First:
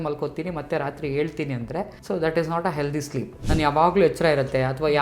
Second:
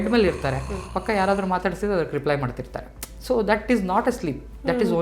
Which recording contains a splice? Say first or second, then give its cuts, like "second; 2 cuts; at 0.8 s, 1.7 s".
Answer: first; 2 cuts; at 2.0 s, 3.3 s